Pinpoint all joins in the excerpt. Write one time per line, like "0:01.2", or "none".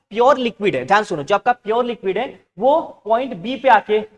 none